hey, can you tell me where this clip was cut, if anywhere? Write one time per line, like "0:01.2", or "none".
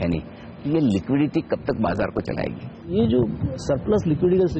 0:02.9